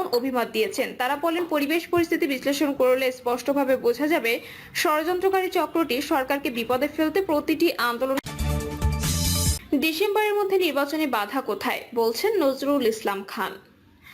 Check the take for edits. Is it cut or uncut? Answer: cut